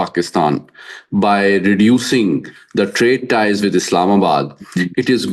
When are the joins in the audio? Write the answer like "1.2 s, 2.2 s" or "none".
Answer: none

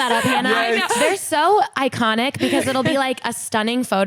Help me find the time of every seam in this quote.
1.0 s

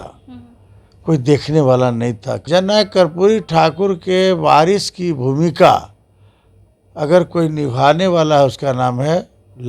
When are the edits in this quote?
2.3 s

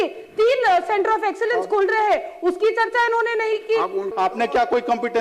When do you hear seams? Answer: 4.1 s

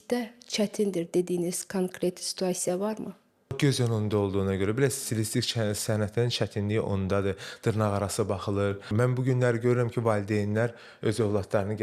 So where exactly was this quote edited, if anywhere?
3.5 s, 8.9 s

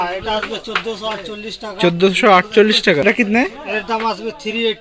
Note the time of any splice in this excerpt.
3.0 s

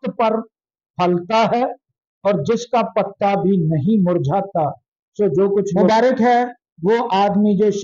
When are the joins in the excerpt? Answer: 5.8 s

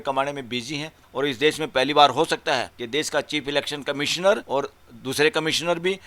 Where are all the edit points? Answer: 1.0 s, 2.8 s, 4.4 s

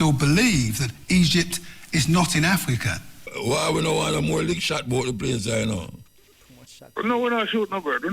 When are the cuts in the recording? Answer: 3.4 s

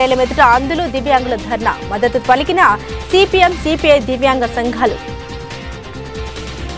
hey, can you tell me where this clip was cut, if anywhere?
none

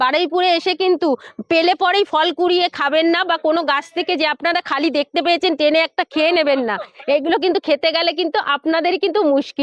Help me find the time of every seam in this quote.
none

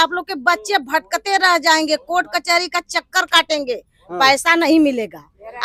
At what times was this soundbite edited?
none

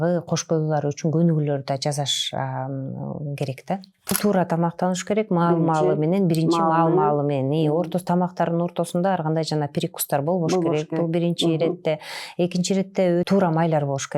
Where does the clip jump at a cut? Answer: 4.2 s, 13.3 s

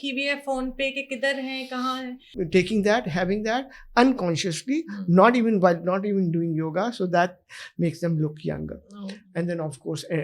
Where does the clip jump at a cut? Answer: 2.3 s

